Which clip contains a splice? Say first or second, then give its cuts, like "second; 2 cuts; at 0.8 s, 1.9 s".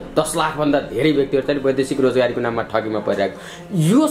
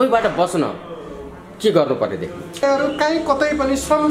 second; 1 cut; at 2.6 s